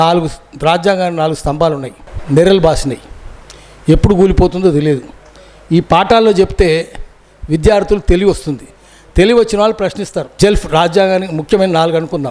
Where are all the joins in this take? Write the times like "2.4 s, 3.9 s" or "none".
2.0 s, 10.2 s